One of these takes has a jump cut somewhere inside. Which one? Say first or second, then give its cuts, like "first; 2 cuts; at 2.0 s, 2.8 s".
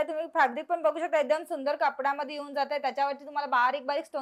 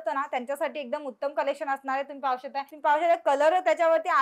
second; 1 cut; at 2.7 s